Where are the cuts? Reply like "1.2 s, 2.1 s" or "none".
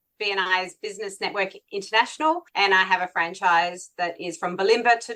none